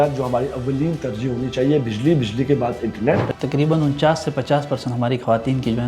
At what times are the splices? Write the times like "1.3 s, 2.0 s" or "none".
3.3 s

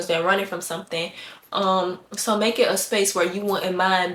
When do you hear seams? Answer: none

